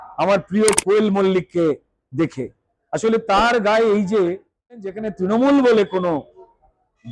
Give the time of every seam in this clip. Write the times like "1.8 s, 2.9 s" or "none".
5.0 s

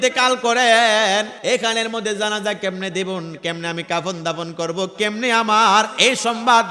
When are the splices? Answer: 1.3 s

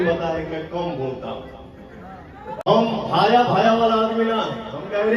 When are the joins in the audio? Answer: 2.6 s

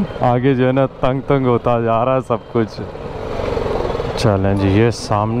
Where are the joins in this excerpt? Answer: 3.2 s

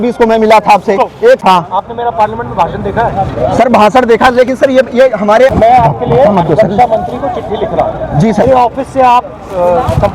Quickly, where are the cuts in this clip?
1.4 s, 5.5 s, 8.4 s

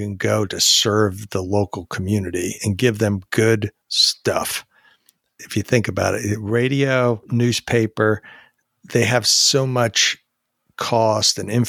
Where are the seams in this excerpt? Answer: none

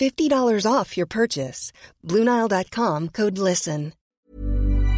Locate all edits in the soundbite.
4.1 s

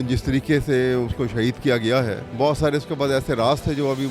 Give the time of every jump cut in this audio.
2.2 s

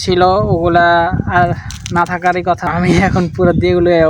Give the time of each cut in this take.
2.7 s

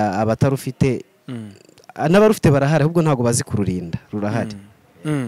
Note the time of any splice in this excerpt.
none

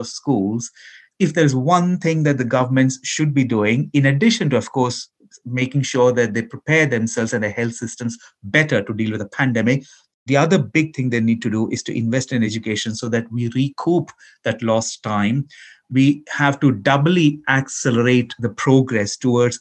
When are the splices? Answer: 12.5 s

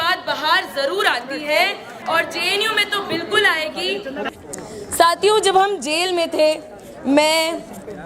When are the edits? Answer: 1.9 s, 4.3 s

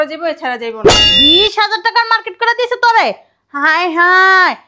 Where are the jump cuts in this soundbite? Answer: 1.0 s

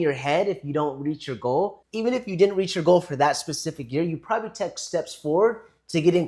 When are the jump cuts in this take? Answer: 1.8 s

